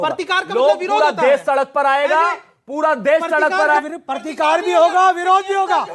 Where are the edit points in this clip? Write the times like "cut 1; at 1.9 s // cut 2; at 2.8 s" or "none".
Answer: cut 1; at 3.8 s